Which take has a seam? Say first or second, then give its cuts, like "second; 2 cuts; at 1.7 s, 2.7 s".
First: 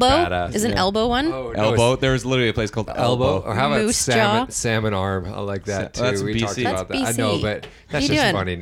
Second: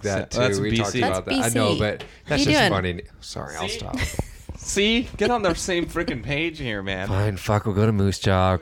second; 1 cut; at 7.0 s